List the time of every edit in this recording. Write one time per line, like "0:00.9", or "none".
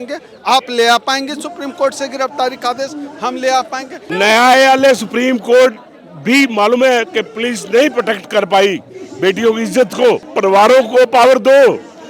0:04.1
0:10.3